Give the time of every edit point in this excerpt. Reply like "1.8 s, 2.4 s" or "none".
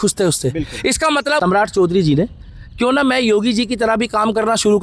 1.4 s

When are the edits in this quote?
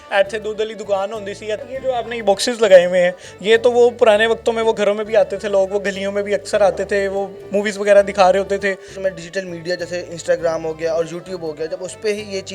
1.7 s, 9.0 s

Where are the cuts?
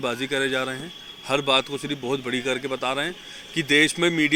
none

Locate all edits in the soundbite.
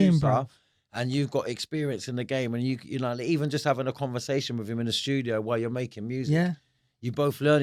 none

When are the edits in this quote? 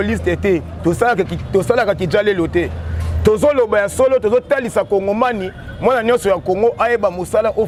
none

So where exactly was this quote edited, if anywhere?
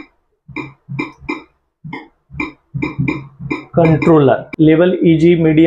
4.5 s

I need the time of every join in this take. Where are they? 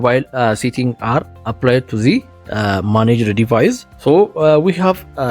1.4 s, 3.9 s

